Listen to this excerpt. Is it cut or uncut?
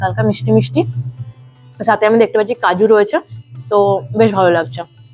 uncut